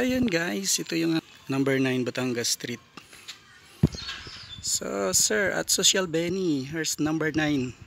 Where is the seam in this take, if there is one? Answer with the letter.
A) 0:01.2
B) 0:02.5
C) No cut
A